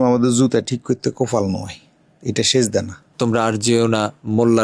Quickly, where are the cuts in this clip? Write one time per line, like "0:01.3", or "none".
0:03.0